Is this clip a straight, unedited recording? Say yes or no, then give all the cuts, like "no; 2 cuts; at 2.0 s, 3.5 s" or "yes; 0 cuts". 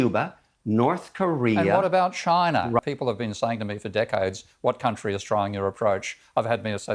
no; 1 cut; at 2.8 s